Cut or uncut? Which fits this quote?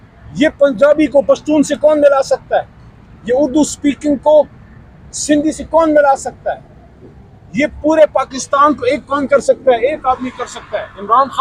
uncut